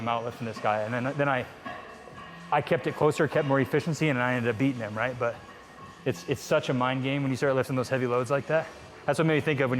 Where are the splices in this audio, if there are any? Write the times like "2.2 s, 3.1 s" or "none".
none